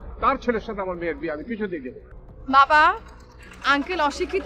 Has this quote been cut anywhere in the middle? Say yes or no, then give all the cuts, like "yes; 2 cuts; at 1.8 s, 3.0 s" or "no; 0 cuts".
yes; 1 cut; at 2.0 s